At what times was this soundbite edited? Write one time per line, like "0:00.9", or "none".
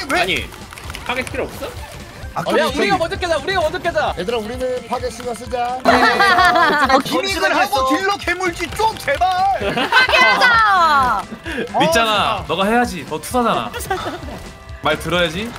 none